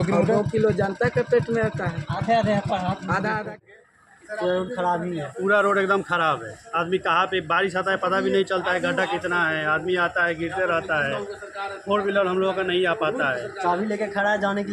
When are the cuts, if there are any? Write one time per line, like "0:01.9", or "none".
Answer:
0:03.6

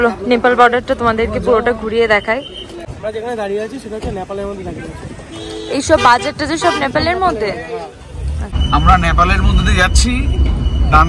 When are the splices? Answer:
0:02.8
0:08.5

